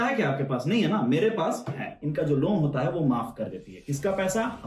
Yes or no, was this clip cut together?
yes